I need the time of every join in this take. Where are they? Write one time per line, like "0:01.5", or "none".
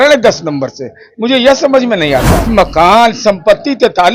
0:02.4